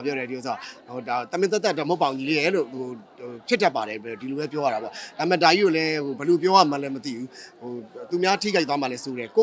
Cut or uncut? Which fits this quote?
uncut